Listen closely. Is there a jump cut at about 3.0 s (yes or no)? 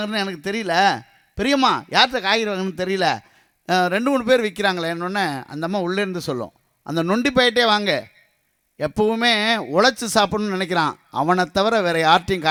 no